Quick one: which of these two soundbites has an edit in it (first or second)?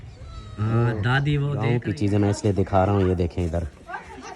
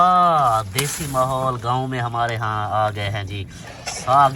first